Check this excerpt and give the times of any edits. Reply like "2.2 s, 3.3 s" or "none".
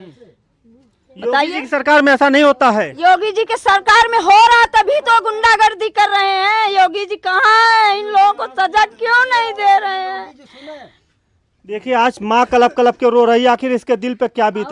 none